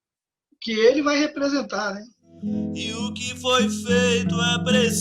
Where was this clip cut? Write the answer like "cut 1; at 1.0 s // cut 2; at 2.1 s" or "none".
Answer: cut 1; at 2.4 s